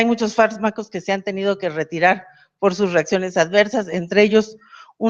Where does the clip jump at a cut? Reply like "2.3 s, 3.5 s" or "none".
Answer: 3.9 s